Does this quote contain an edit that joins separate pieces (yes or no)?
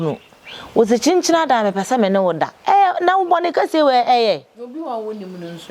no